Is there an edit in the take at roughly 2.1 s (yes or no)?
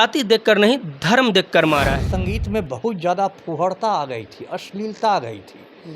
yes